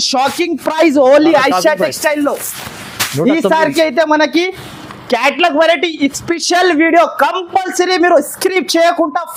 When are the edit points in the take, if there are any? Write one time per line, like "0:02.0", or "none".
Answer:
none